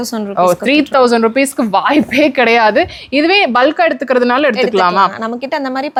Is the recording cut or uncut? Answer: uncut